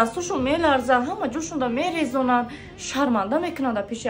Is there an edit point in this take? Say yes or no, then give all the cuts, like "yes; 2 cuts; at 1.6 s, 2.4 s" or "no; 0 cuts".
no; 0 cuts